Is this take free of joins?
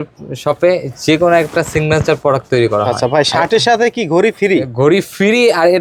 yes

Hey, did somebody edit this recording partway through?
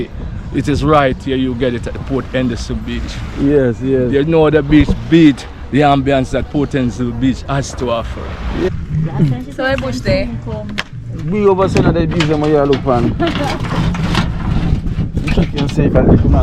yes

